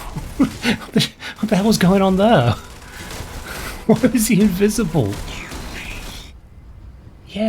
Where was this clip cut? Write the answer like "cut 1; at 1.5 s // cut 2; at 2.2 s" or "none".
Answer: cut 1; at 6.2 s